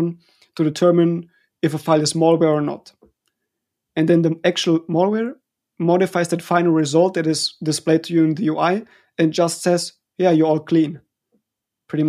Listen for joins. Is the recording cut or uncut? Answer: uncut